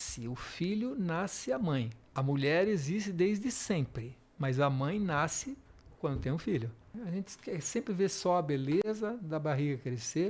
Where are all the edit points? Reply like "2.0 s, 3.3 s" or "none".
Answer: 2.0 s, 7.0 s